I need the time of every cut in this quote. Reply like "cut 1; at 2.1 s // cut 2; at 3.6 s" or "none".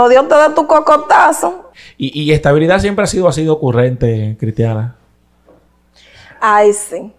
cut 1; at 1.7 s